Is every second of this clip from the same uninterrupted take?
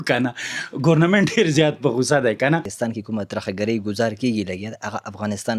no; 1 cut; at 2.7 s

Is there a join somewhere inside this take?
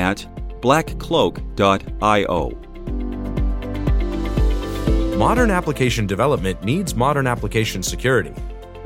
yes; 2 cuts; at 2.7 s, 5.1 s

